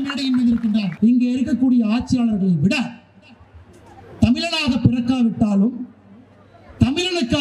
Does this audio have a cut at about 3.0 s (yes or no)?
no